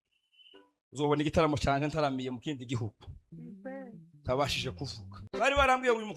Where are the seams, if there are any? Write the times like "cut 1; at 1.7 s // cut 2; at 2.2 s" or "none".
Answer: cut 1; at 5.2 s